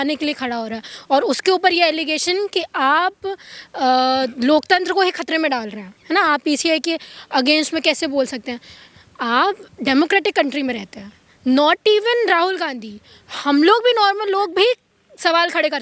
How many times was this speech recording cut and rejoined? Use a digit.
0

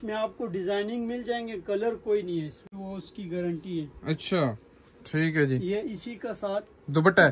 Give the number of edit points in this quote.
1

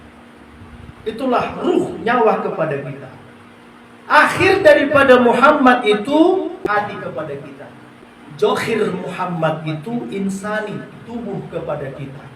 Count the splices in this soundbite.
2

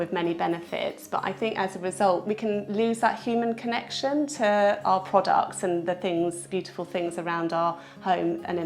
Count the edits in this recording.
2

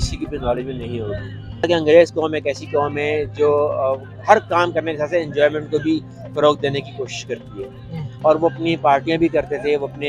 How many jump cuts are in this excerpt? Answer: 1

